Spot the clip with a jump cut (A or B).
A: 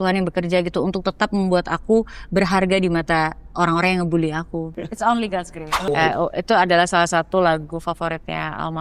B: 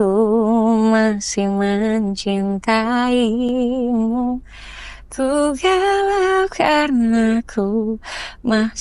A